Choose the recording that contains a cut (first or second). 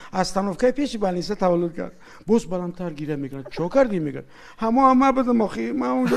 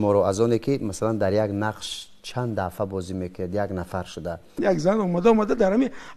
second